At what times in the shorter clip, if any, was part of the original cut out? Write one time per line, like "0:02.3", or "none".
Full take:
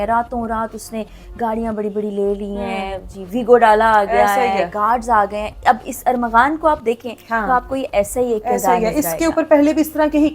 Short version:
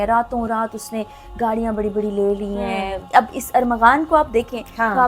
0:03.0